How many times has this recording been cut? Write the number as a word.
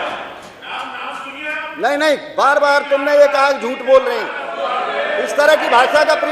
zero